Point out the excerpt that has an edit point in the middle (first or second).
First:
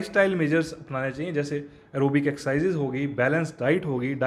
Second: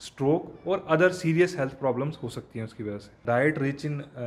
second